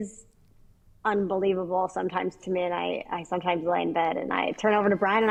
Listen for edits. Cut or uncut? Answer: uncut